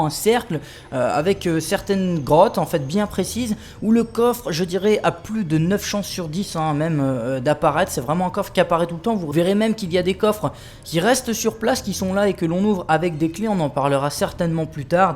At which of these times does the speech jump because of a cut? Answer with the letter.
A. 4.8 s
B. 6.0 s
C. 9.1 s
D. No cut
B